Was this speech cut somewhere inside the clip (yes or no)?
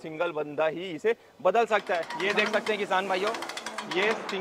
yes